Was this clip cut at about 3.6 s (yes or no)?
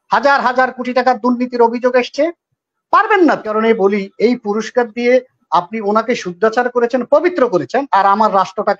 yes